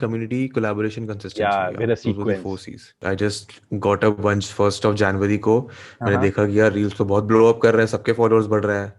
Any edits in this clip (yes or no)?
yes